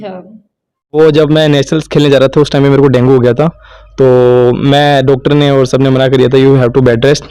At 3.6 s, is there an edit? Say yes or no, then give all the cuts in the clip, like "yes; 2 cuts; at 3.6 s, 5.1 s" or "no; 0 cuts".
no; 1 cut; at 1.0 s